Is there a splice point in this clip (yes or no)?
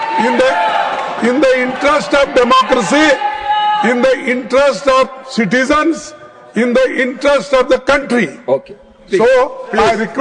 no